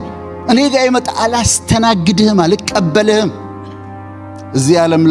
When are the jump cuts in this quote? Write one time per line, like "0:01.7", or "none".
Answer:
0:04.0